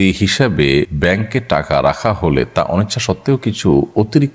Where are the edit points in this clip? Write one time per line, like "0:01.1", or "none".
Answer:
0:00.9